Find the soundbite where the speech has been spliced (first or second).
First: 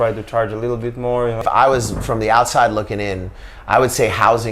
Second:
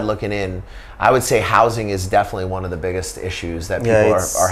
first